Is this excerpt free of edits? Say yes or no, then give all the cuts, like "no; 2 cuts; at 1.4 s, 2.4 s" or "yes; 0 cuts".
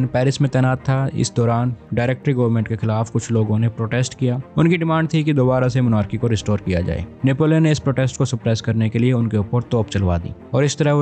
yes; 0 cuts